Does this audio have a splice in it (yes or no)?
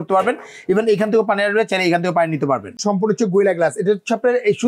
yes